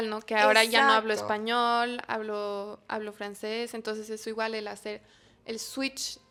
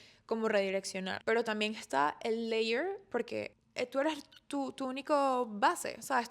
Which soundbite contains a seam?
second; 2 cuts; at 1.1 s, 3.6 s

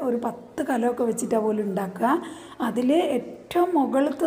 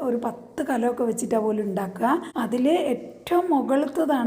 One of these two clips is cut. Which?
second; 1 cut; at 2.3 s

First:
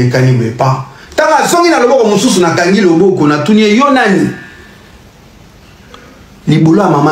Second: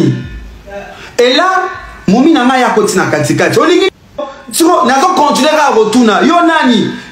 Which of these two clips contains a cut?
second; 1 cut; at 3.9 s

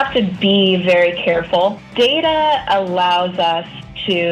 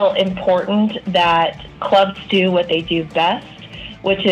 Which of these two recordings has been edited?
first; 1 cut; at 1.9 s

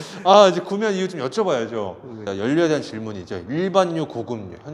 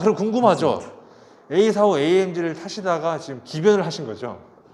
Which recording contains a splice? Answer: first; 1 cut; at 2.3 s

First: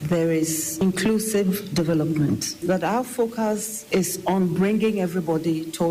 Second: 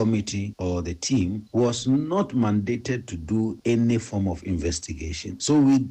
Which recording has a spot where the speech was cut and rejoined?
first; 2 cuts; at 2.6 s, 3.7 s

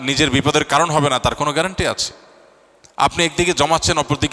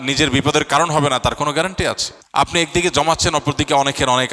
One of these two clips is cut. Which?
second; 1 cut; at 2.5 s

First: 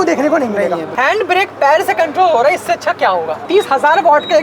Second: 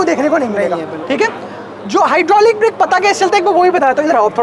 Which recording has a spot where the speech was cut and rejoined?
first; 2 cuts; at 0.9 s, 3.4 s

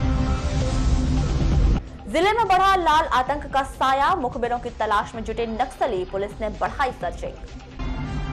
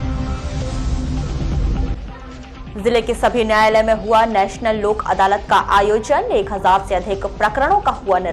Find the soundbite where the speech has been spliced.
second; 1 cut; at 1.5 s

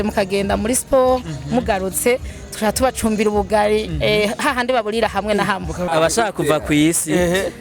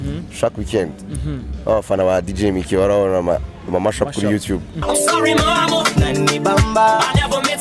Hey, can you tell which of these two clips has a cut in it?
first; 1 cut; at 5.9 s

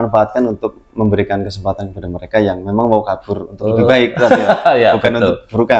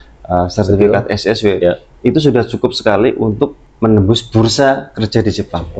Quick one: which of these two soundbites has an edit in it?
second; 1 cut; at 3.6 s

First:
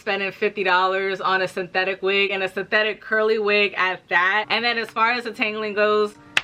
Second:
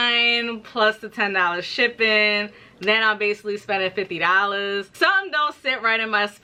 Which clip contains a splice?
first; 1 cut; at 4.5 s

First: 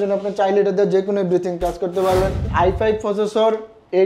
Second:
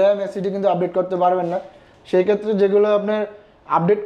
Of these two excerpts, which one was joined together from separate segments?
first; 1 cut; at 2.5 s

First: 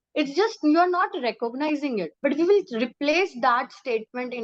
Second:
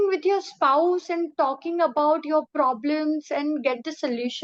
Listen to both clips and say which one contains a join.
first; 1 cut; at 2.1 s

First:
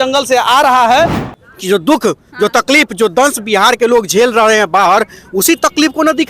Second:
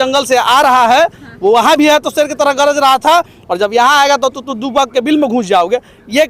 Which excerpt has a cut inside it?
first; 1 cut; at 1.2 s

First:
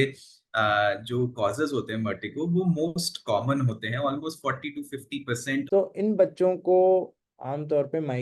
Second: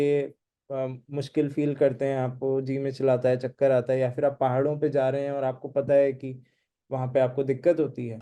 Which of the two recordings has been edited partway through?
first; 1 cut; at 5.7 s

